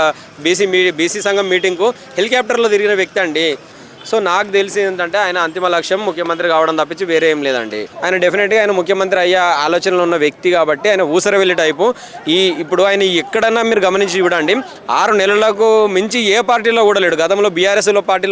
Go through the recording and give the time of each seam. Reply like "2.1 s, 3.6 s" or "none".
3.8 s, 7.9 s